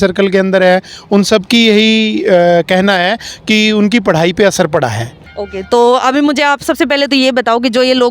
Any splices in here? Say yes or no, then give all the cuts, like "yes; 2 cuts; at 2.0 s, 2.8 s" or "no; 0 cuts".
yes; 1 cut; at 5.1 s